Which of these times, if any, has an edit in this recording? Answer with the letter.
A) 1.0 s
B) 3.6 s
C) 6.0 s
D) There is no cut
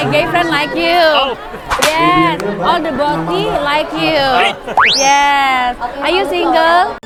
D